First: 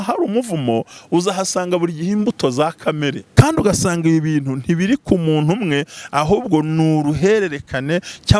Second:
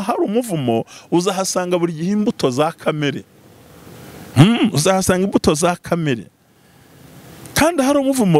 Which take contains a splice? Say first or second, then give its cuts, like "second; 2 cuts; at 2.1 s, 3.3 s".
first; 1 cut; at 3.2 s